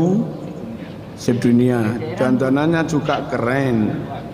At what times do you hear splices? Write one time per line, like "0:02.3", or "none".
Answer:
none